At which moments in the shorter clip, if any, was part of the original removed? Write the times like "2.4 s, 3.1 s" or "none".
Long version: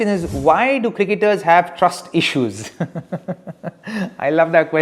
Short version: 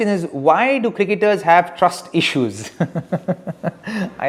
none